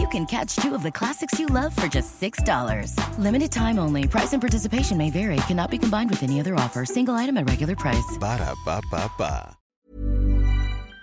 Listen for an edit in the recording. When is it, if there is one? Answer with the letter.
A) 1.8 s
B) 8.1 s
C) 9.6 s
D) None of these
C